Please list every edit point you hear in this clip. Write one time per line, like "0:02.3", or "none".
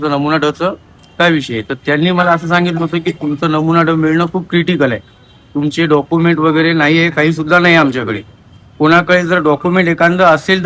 none